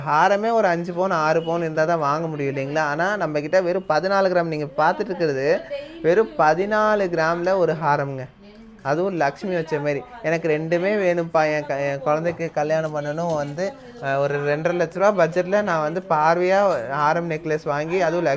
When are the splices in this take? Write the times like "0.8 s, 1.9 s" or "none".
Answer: none